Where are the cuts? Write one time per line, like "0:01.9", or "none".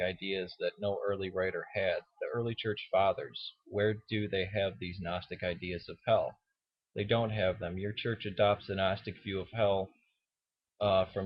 none

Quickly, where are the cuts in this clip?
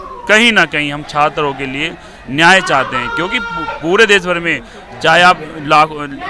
none

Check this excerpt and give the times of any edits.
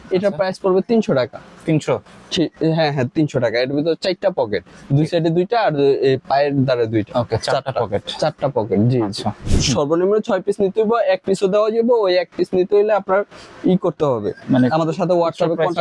0:09.5

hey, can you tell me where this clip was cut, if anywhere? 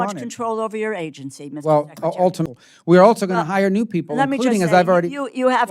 0:02.5

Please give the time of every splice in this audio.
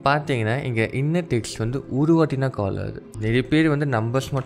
0:03.1

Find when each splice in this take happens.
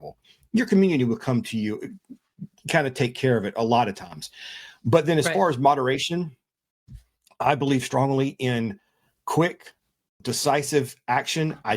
0:10.2

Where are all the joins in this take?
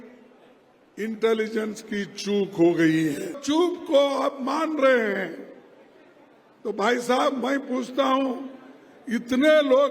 0:03.4

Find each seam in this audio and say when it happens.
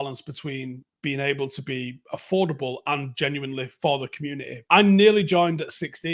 0:04.5

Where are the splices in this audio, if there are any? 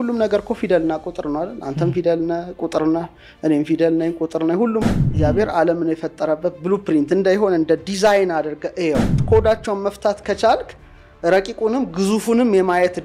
0:05.0
0:09.2

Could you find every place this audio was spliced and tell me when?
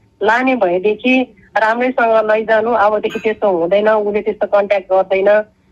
none

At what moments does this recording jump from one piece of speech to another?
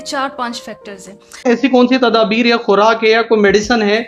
0:01.5

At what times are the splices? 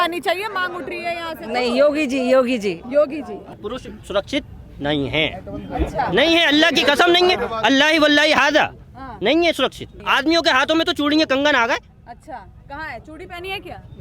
0:03.5
0:09.9

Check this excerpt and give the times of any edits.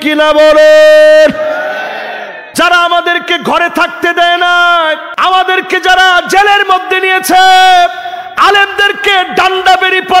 0:02.4
0:05.1

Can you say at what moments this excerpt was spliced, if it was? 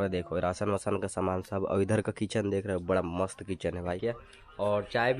0:04.0

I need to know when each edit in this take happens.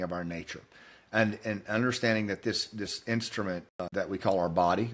0:03.8

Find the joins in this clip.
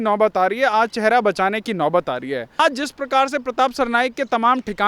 0:02.6

